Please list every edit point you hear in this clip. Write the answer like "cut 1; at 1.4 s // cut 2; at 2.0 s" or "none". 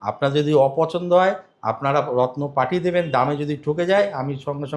none